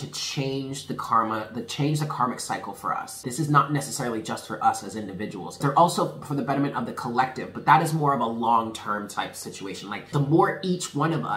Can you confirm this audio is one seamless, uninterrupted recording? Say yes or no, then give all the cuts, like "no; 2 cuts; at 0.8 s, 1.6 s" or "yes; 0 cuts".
no; 3 cuts; at 3.2 s, 5.5 s, 10.1 s